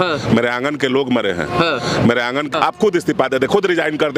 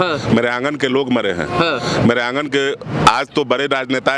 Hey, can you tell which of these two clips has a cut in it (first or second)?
first